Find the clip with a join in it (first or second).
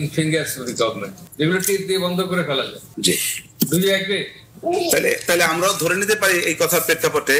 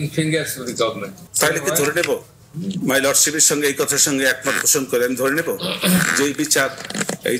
first